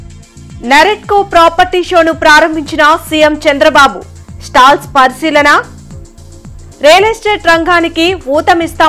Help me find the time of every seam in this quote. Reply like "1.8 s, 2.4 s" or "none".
none